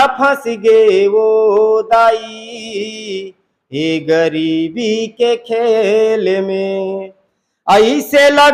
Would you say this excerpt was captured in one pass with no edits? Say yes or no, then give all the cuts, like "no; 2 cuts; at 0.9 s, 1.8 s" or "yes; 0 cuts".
yes; 0 cuts